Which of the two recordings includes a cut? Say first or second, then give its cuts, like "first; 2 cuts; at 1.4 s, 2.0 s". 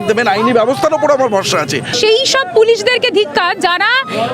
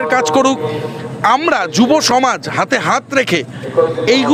first; 1 cut; at 1.9 s